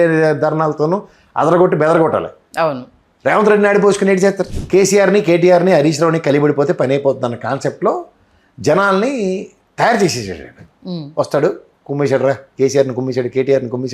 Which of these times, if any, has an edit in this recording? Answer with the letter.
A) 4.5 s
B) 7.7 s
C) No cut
A